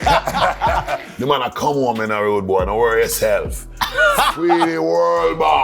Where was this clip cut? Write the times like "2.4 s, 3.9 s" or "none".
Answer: 1.2 s